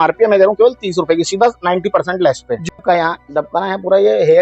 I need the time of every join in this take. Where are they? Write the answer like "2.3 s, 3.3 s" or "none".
2.7 s